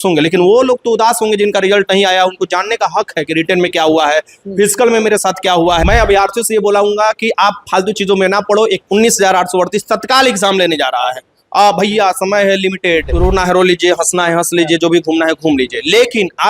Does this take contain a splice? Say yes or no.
yes